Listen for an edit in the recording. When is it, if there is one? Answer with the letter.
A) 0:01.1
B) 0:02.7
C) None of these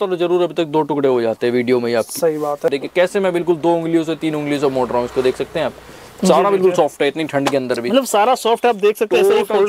B